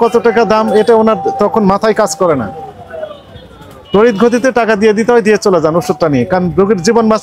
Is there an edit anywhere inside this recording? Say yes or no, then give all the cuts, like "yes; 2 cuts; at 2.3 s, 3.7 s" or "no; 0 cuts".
no; 0 cuts